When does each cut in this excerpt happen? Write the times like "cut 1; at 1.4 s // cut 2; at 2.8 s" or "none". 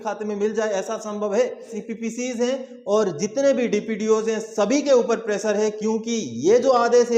cut 1; at 1.8 s